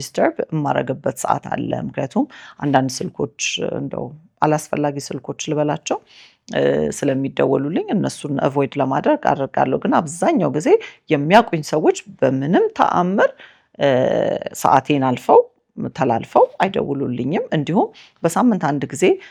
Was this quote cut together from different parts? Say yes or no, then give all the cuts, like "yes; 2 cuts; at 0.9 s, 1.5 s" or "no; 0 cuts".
no; 0 cuts